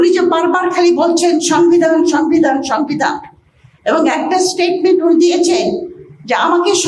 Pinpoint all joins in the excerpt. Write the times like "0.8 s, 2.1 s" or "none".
none